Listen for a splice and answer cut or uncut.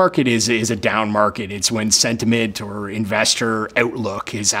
cut